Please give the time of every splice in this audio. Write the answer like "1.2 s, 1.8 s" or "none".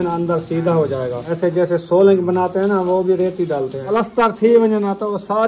1.2 s, 3.9 s